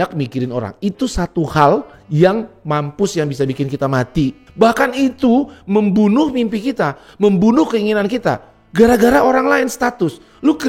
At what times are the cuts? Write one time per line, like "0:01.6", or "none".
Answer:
0:04.4